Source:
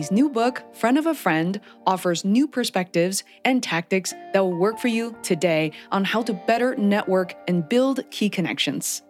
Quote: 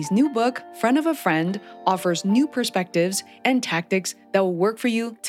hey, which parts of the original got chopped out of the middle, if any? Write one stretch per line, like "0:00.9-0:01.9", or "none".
none

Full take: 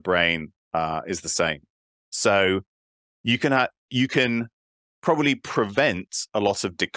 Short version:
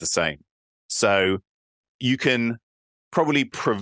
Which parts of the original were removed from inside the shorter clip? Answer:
0:03.1-0:03.8

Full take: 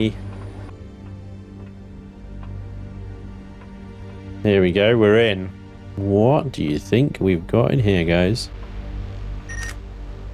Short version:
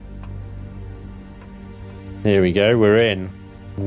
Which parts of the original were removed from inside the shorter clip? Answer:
none

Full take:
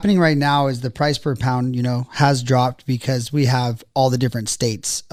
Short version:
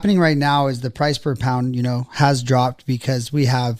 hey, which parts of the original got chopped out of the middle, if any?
none

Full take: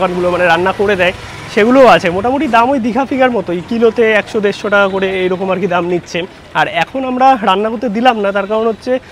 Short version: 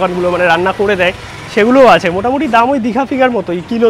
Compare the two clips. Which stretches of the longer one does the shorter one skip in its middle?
none

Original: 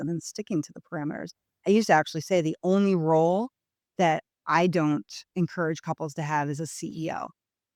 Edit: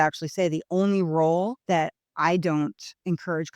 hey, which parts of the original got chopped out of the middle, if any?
0:03.5-0:03.9

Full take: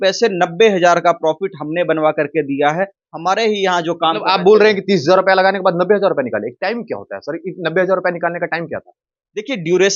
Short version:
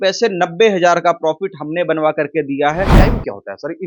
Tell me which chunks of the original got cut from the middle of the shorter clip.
0:02.9-0:06.6

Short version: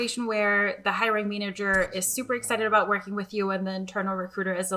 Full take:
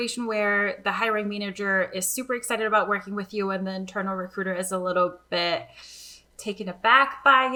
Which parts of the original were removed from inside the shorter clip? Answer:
none

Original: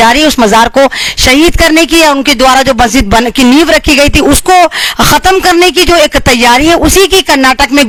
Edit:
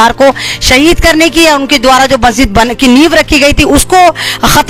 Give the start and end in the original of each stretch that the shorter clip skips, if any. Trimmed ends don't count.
none

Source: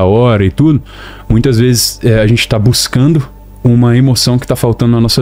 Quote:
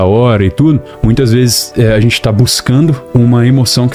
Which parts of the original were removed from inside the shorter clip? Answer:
0:00.9-0:01.2
0:03.3-0:03.5

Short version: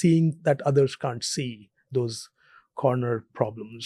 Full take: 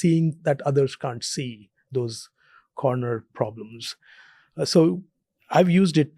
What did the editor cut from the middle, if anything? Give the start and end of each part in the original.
none

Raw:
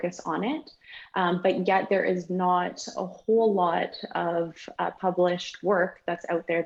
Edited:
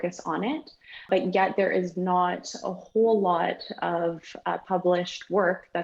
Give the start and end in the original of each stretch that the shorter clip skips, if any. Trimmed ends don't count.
0:01.1-0:01.4

